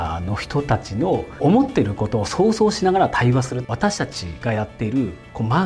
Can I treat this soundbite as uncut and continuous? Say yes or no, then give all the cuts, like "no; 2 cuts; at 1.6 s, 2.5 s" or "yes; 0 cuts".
no; 2 cuts; at 1.4 s, 3.7 s